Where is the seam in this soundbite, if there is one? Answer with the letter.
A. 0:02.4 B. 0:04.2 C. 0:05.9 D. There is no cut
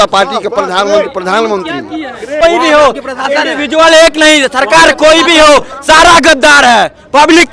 A